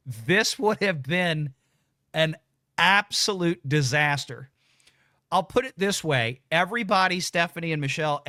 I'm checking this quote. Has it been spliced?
no; 0 cuts

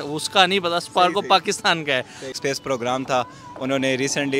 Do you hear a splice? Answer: yes; 1 cut; at 2.3 s

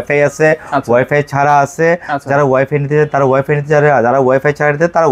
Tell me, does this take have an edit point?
no; 0 cuts

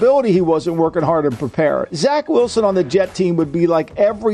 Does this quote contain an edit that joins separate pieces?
yes; 1 cut; at 1.9 s

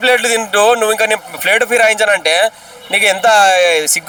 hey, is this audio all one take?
yes; 0 cuts

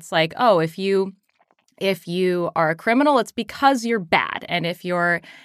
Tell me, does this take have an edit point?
no; 0 cuts

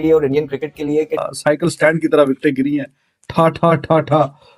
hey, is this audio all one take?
no; 1 cut; at 1.2 s

